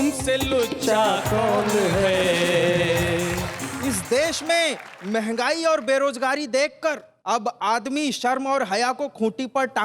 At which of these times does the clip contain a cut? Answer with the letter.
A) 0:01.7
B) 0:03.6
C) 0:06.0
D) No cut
B